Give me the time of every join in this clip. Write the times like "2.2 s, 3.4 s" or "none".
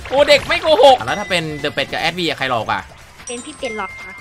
1.0 s

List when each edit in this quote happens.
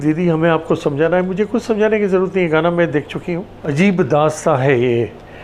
3.6 s

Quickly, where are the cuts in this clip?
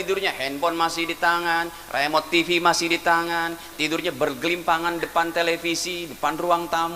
none

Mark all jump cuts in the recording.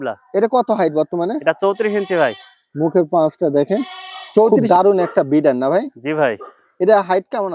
4.6 s

